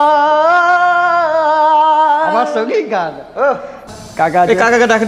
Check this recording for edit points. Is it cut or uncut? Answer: cut